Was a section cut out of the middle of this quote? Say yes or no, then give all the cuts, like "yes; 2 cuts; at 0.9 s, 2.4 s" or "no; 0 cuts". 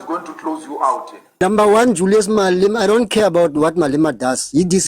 yes; 1 cut; at 1.2 s